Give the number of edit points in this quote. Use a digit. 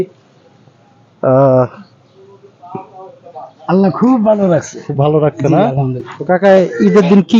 1